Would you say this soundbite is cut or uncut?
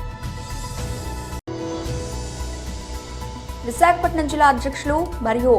cut